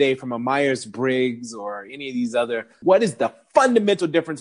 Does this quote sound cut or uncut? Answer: cut